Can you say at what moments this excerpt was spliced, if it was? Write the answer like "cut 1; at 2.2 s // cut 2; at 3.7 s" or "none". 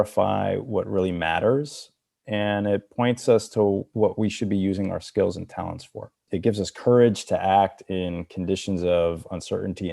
cut 1; at 3.9 s // cut 2; at 6.3 s